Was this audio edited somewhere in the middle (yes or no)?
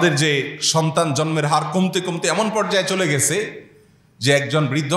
no